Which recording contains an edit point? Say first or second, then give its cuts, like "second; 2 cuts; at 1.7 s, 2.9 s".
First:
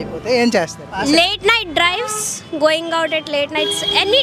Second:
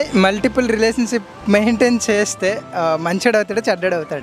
first; 1 cut; at 1.0 s